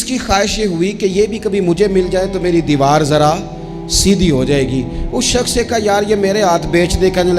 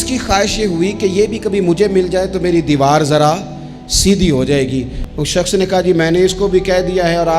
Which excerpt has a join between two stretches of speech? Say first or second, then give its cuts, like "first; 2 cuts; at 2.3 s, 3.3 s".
second; 1 cut; at 5.0 s